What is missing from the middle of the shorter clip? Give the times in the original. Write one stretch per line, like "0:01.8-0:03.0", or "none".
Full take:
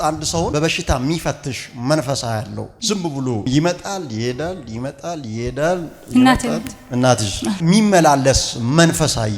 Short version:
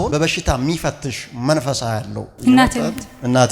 0:02.7-0:06.0

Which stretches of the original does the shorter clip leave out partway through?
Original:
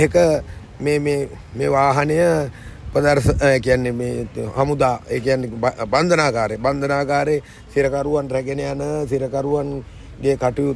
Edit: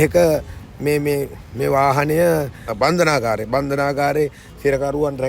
0:02.7-0:05.8

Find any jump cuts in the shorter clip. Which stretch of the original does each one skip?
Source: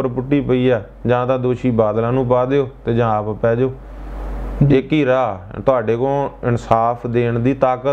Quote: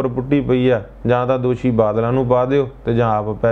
none

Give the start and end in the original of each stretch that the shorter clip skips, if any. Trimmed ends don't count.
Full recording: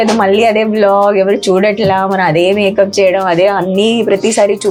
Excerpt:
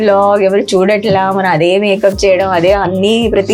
none

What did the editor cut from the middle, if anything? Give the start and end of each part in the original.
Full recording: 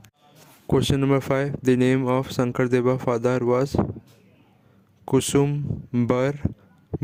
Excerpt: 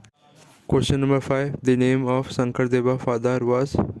none

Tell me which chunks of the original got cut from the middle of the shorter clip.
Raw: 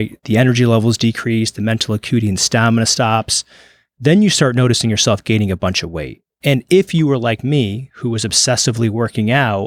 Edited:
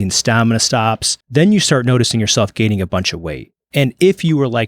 0:03.4-0:03.8

